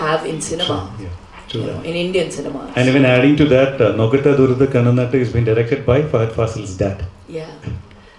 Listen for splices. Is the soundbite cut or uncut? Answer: uncut